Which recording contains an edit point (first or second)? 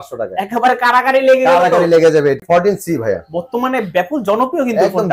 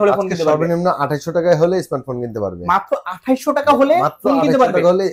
first